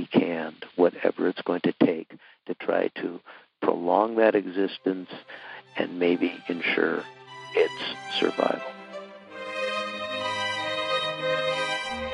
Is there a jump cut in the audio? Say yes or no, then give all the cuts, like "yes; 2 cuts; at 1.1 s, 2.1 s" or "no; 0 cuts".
yes; 1 cut; at 8.6 s